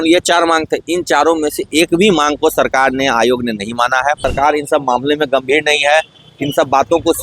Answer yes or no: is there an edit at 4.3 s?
yes